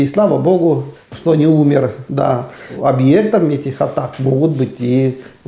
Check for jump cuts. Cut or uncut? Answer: cut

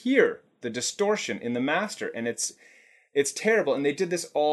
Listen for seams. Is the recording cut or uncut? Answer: uncut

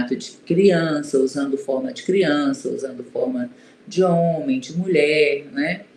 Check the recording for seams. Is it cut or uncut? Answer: uncut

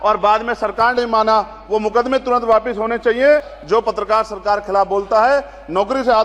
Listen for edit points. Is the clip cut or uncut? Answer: cut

